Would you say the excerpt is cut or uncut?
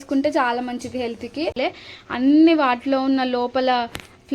cut